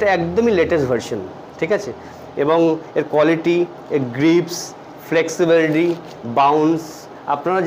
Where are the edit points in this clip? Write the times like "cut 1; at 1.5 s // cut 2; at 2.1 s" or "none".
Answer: none